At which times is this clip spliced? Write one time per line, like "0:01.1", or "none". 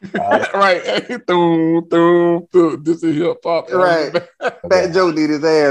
0:04.6